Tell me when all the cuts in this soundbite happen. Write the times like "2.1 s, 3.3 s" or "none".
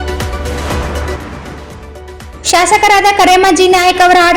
2.2 s

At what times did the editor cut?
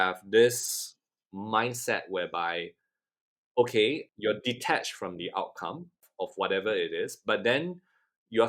none

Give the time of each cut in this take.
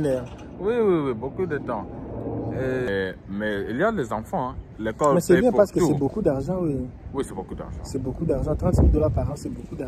2.9 s

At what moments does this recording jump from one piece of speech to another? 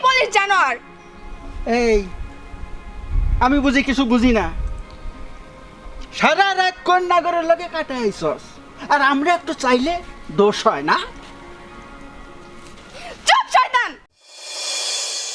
13.9 s

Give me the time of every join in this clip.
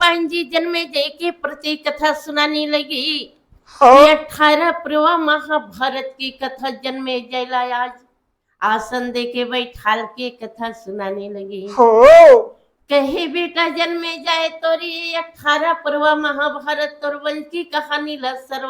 none

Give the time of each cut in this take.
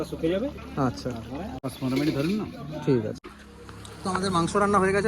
1.6 s, 3.3 s

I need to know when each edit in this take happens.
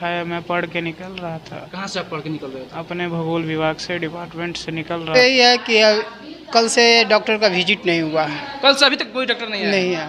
5.1 s

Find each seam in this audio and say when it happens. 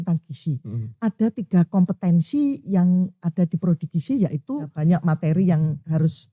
4.7 s

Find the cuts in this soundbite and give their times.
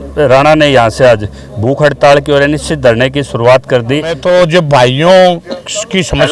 4.2 s

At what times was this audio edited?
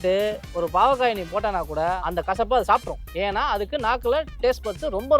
2.0 s, 3.0 s

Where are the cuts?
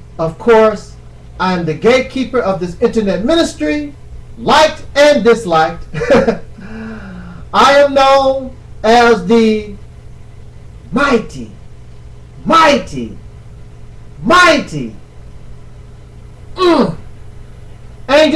4.7 s

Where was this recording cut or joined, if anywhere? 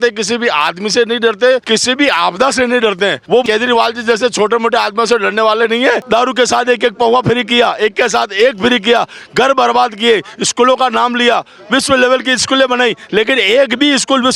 1.6 s, 3.4 s, 6.0 s

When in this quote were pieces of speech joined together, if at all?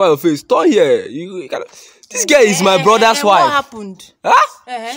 none

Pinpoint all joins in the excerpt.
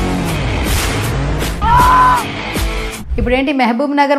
1.6 s, 3.0 s

